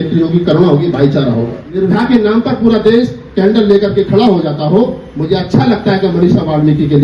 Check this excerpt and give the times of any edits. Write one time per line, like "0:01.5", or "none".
0:01.7